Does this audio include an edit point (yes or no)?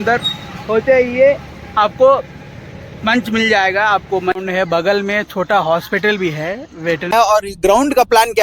yes